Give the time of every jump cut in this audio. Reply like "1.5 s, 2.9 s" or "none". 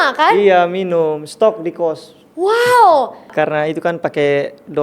3.2 s